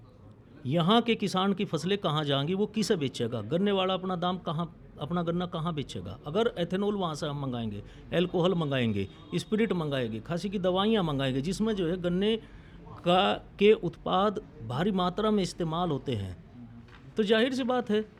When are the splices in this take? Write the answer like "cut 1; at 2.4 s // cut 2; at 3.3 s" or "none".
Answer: none